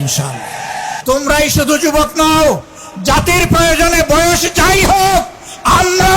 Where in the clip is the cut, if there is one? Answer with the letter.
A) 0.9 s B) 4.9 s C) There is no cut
A